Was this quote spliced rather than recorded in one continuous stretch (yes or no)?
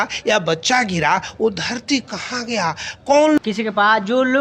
yes